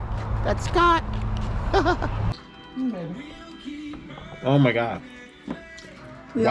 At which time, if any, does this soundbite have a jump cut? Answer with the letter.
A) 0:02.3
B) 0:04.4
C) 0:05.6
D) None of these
A